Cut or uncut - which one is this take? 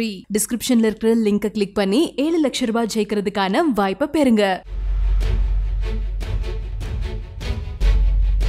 uncut